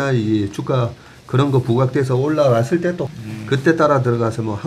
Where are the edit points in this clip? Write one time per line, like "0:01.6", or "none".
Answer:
0:03.1